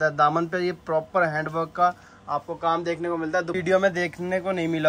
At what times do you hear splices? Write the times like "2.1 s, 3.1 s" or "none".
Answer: 3.5 s